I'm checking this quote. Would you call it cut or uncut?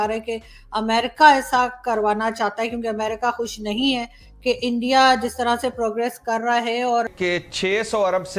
cut